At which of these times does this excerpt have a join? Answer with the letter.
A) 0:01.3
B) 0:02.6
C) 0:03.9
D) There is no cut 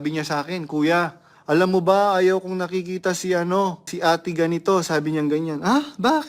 C